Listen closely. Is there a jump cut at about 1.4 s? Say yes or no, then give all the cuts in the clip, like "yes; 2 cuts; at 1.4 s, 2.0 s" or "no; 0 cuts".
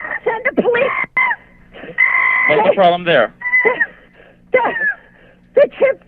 no; 0 cuts